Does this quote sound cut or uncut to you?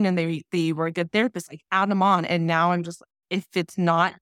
uncut